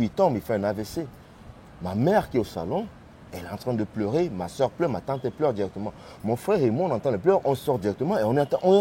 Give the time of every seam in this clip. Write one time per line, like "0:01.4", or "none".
none